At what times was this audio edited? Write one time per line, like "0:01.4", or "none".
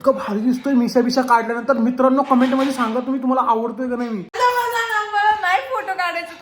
0:04.3